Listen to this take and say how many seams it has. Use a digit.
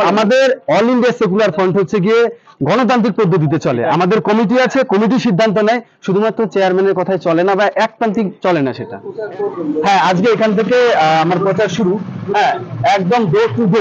1